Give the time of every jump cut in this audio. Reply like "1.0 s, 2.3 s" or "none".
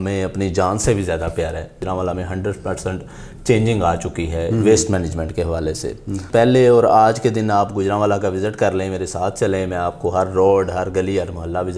1.8 s, 6.3 s

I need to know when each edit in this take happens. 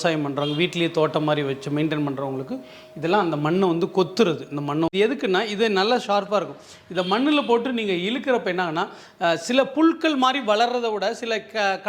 4.9 s

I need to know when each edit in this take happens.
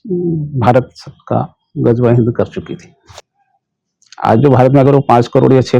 3.0 s

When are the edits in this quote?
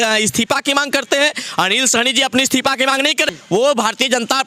3.3 s

